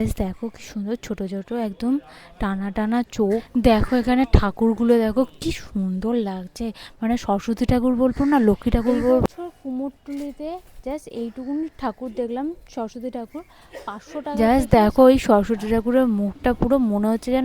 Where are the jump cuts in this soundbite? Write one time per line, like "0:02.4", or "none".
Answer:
0:03.6
0:09.3
0:14.4